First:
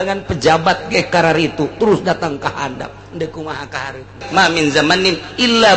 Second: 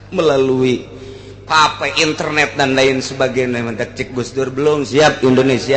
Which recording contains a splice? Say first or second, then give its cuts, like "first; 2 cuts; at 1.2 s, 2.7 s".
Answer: first; 1 cut; at 4.1 s